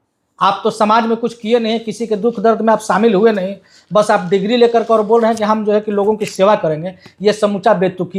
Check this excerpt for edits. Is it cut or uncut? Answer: uncut